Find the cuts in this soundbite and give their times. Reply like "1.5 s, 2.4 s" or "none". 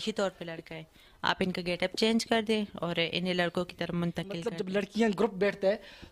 4.4 s